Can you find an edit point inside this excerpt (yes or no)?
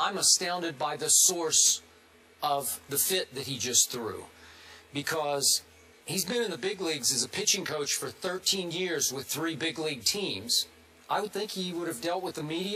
yes